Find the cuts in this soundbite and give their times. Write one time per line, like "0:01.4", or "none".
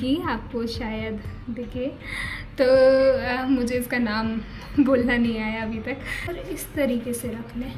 0:06.3